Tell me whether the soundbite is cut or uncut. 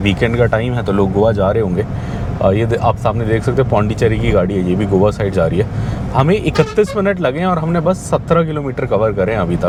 uncut